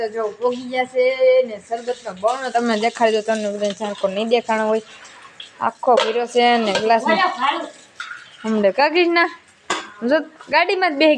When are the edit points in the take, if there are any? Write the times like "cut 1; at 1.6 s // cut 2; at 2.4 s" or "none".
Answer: none